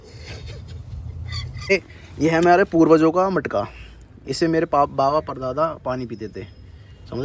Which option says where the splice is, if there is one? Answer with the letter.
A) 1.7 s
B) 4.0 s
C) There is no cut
A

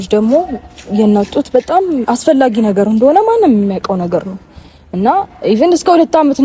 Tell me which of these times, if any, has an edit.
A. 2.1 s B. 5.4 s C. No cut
C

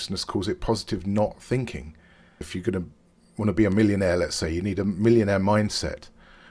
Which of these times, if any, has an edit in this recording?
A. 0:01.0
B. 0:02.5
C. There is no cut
B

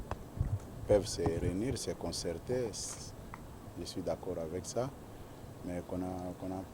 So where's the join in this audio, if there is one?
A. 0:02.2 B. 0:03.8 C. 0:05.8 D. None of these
D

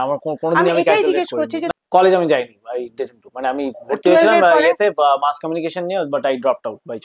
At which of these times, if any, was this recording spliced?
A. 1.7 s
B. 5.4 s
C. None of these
A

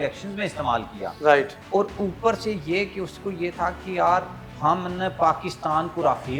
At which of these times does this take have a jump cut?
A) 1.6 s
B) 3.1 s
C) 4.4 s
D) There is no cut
C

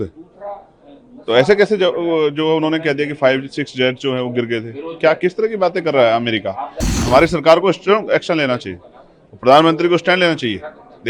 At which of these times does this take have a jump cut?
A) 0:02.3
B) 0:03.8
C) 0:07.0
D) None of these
C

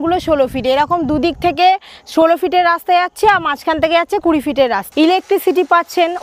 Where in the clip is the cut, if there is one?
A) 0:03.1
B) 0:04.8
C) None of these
B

